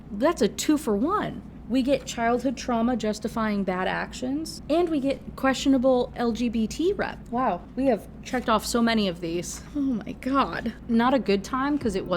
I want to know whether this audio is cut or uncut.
cut